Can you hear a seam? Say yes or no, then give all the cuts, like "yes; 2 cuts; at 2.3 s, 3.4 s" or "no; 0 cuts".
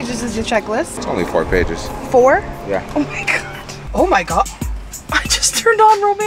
yes; 2 cuts; at 1.0 s, 3.7 s